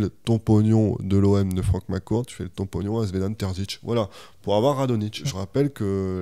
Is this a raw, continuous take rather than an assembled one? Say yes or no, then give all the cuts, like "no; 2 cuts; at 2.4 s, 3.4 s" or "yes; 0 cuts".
no; 1 cut; at 5.2 s